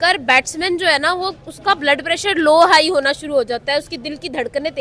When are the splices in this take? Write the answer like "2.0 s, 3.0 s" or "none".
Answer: none

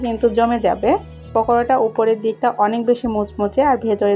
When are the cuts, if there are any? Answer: 1.2 s

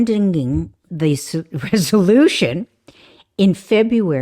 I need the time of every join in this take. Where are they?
none

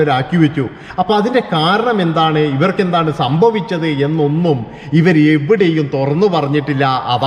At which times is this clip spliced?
none

